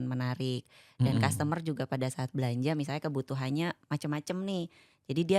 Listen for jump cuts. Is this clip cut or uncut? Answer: uncut